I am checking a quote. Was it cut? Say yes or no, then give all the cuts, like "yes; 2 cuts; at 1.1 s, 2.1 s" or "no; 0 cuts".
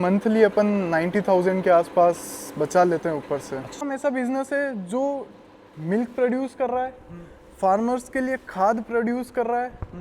yes; 1 cut; at 3.8 s